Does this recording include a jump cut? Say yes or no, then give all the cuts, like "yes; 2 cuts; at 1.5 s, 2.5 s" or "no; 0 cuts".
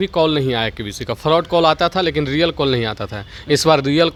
no; 0 cuts